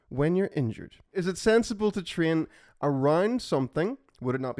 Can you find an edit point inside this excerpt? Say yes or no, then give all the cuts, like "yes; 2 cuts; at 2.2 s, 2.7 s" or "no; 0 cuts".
yes; 1 cut; at 1.2 s